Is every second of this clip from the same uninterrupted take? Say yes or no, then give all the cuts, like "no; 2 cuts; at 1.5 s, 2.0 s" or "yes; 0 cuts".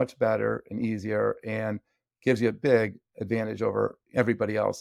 yes; 0 cuts